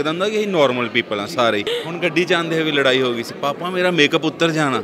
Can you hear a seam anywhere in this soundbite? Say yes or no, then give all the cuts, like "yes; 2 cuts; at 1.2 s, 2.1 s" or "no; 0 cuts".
yes; 1 cut; at 1.7 s